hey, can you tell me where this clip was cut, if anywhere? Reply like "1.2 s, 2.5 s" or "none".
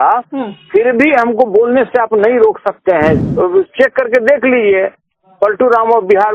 3.2 s